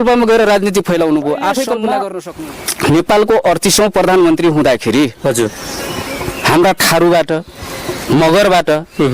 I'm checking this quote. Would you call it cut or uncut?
cut